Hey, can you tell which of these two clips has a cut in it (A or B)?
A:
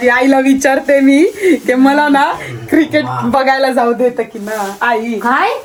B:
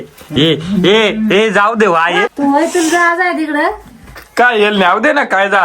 B